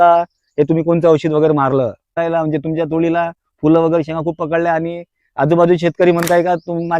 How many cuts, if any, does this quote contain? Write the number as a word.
one